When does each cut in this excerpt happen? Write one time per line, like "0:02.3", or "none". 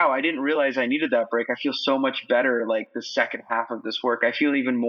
none